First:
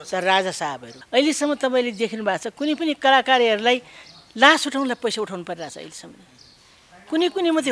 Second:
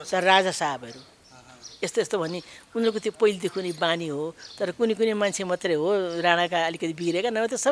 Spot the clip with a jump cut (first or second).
first